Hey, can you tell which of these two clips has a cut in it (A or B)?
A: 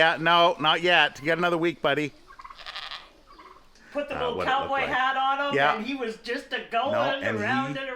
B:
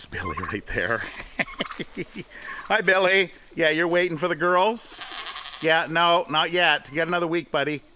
A